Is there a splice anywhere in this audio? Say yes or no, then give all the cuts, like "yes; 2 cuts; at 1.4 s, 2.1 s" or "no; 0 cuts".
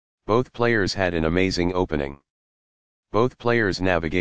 yes; 1 cut; at 0.9 s